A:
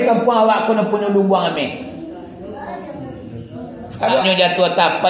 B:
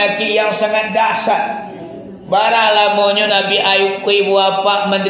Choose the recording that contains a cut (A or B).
A